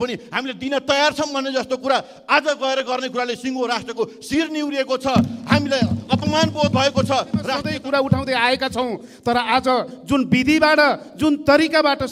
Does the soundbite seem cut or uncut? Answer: cut